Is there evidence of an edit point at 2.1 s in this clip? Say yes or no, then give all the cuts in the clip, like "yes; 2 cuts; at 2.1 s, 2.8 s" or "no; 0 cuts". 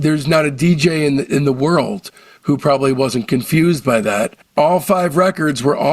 no; 1 cut; at 4.4 s